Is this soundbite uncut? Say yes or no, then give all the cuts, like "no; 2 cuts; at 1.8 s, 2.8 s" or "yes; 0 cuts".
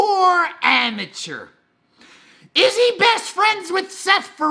yes; 0 cuts